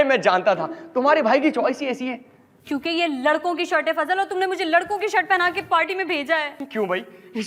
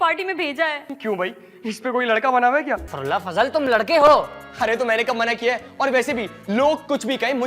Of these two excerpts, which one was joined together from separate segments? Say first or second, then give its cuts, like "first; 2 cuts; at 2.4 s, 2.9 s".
second; 1 cut; at 2.9 s